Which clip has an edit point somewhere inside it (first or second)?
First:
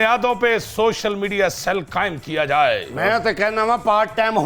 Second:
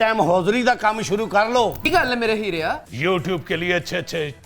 second